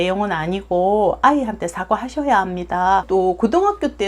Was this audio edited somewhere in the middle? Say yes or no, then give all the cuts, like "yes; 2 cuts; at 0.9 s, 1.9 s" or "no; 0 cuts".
yes; 1 cut; at 3.0 s